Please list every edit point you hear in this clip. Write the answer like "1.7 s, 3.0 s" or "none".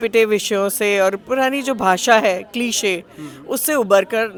none